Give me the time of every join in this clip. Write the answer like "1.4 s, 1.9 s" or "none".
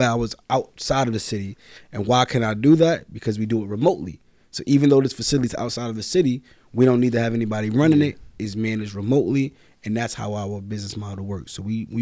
none